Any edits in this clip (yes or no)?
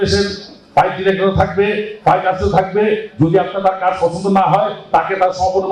no